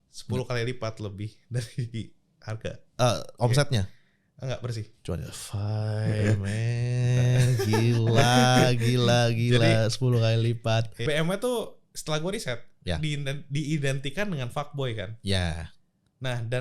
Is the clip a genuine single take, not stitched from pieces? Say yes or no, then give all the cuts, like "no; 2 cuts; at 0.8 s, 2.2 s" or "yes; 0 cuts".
no; 1 cut; at 11.0 s